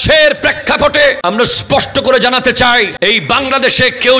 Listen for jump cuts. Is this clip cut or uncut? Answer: cut